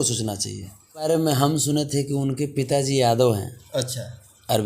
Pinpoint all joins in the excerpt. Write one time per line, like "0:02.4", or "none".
0:01.1